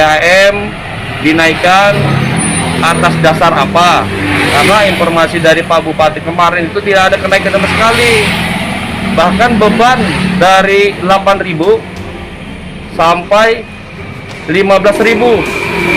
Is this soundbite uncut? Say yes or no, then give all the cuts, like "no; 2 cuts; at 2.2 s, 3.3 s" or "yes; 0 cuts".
yes; 0 cuts